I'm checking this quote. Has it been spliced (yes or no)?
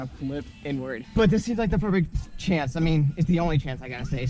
yes